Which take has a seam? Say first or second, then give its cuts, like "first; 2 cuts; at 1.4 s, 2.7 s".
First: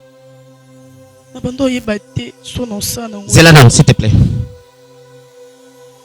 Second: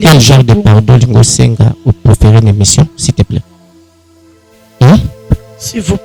first; 2 cuts; at 1.1 s, 4.5 s